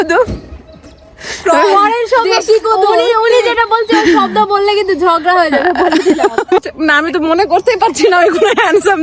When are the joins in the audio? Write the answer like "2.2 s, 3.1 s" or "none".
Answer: 6.6 s